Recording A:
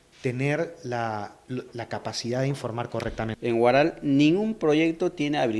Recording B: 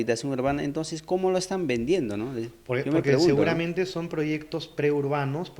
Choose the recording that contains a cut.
A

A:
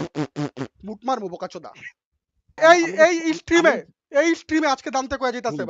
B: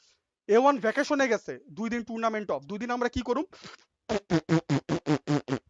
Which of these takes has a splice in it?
A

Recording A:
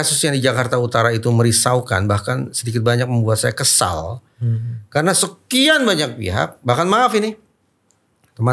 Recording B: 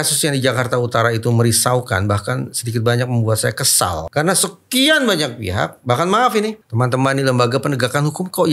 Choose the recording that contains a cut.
B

